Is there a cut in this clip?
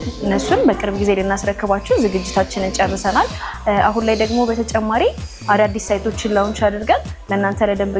no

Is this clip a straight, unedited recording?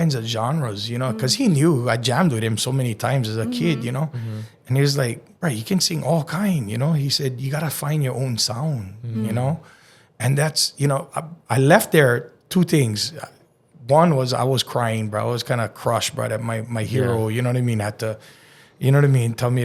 yes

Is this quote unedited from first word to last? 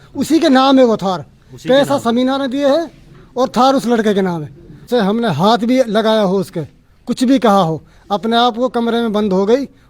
no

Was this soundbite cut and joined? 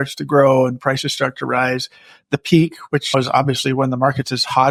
no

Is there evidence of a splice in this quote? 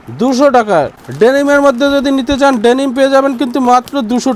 yes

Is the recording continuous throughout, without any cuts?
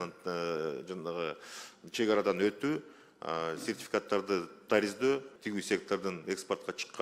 no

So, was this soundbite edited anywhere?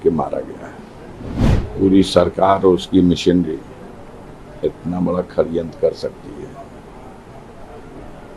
yes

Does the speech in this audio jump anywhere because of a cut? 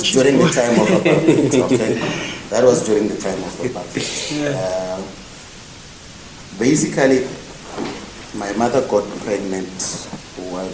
no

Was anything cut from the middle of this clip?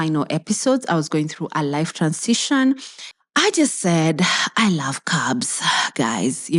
yes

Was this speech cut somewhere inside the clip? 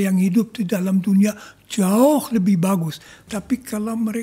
yes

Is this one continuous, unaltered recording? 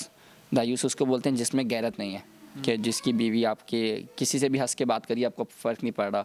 yes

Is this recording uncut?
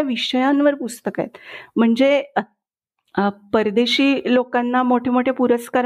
yes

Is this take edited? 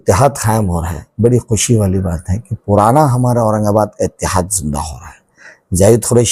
no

